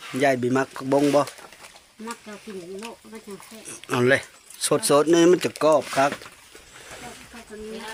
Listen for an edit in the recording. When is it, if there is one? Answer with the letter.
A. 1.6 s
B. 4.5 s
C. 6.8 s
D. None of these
D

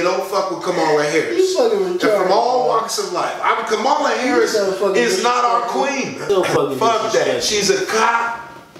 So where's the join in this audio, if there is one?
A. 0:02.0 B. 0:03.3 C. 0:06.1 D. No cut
C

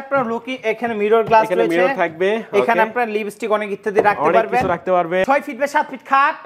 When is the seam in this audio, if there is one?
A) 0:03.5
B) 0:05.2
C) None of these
B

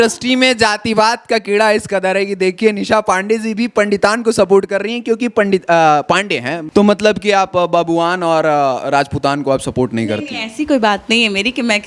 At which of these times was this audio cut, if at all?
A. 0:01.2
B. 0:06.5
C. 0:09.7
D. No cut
B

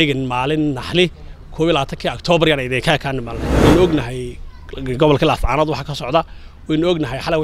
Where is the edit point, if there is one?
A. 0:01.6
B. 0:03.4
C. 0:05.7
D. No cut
B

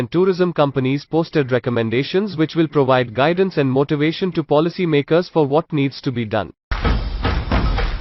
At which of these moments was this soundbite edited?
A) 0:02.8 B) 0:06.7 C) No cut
B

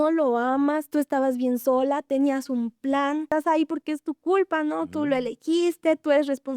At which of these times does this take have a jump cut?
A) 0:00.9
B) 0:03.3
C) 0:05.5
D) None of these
B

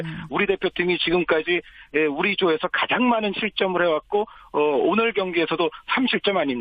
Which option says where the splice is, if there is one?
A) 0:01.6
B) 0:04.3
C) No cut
B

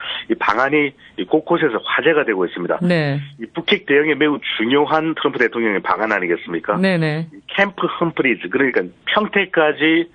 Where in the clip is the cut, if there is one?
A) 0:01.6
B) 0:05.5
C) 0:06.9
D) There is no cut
D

